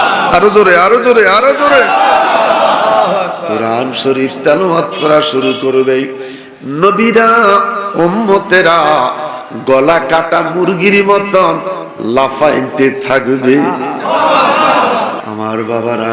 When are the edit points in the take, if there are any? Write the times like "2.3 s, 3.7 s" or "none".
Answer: 15.2 s